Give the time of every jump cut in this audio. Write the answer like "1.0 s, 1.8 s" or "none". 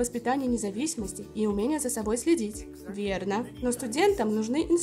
none

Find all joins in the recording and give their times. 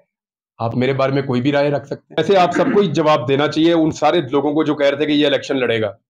2.1 s

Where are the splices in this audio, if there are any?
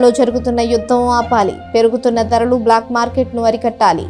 none

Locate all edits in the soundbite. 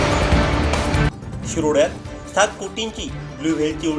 0.9 s

